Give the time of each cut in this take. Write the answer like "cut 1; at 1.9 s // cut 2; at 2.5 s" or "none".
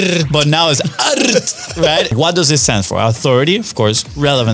cut 1; at 2.1 s